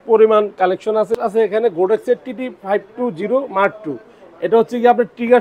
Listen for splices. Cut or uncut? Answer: cut